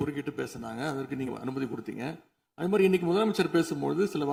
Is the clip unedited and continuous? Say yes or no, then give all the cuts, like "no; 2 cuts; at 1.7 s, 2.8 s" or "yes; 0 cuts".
yes; 0 cuts